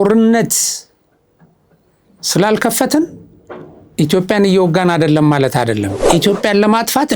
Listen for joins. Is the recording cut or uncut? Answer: cut